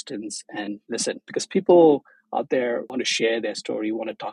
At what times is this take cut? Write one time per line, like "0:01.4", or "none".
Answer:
0:01.3
0:02.9